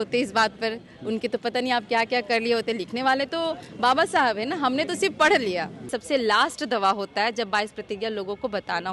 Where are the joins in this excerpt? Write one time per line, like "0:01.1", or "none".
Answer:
0:06.0